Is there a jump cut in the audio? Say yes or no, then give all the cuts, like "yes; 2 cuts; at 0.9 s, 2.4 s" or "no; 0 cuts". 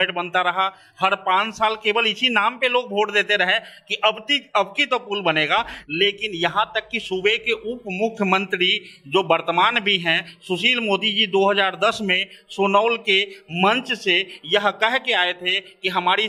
no; 0 cuts